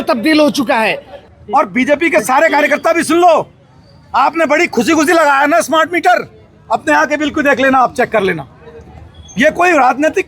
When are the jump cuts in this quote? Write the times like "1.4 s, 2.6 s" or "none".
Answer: 1.2 s